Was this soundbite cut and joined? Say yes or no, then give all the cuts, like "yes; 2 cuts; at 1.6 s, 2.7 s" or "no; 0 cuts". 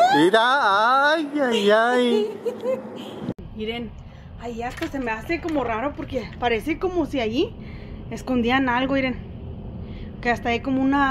yes; 1 cut; at 3.3 s